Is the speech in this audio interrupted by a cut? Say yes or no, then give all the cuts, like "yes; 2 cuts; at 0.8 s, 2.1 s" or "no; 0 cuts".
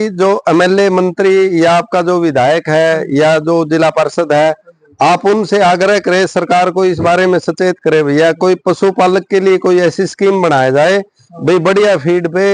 no; 0 cuts